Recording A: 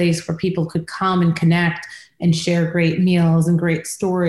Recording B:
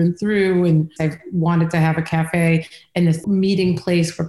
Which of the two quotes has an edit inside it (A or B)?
B